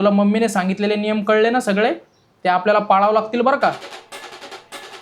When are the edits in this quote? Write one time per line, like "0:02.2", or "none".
0:03.8